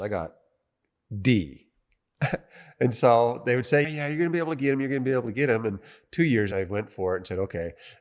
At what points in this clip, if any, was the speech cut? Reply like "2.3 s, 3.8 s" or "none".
none